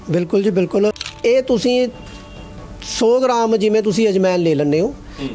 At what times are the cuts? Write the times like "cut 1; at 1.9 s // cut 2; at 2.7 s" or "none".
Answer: cut 1; at 1.2 s